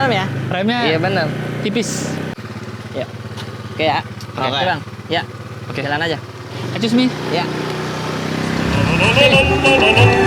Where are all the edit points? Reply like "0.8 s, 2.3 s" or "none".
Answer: 2.4 s